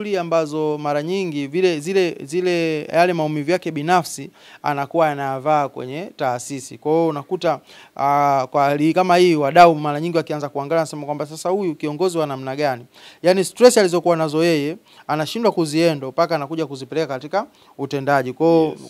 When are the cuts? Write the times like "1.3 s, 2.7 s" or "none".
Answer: none